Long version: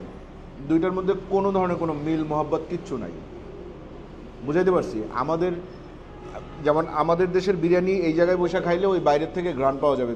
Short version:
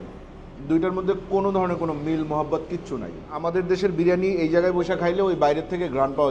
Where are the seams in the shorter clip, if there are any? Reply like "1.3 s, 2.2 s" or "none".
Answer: 3.4 s